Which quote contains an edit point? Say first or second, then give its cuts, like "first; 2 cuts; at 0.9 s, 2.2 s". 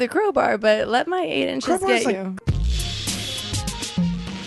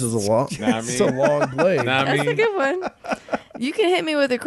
first; 1 cut; at 2.4 s